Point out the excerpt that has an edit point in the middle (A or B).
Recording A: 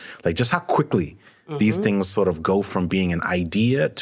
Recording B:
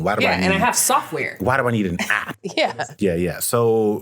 B